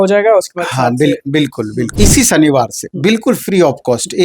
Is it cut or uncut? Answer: cut